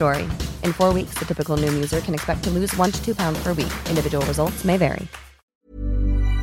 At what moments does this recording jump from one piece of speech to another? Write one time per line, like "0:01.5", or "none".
0:05.4

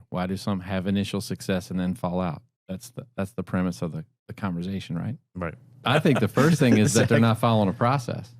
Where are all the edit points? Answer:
0:05.8

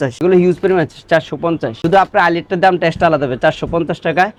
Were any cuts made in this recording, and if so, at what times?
none

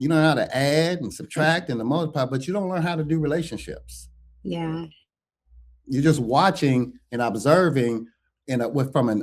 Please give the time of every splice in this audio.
none

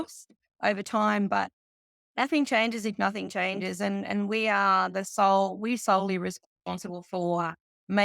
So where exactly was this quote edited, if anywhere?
none

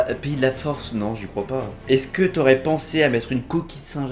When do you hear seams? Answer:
0:01.7

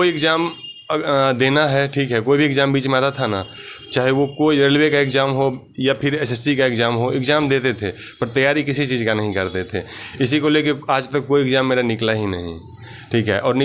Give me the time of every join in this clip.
none

